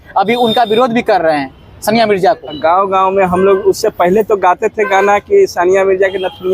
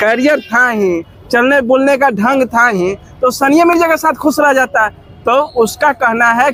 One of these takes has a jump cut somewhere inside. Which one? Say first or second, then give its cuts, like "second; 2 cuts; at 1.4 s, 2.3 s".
first; 1 cut; at 2.6 s